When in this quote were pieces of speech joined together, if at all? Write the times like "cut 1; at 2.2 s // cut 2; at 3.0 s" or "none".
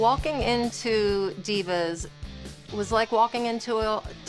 none